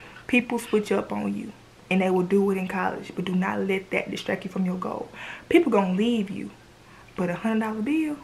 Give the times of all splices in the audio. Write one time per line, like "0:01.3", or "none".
none